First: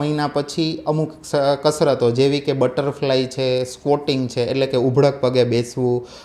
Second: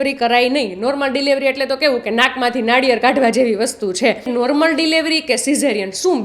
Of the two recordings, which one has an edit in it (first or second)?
second